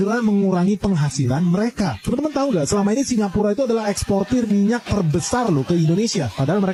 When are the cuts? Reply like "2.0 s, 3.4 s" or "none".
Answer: none